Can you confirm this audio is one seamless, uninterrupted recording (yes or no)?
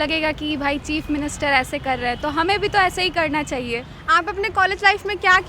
no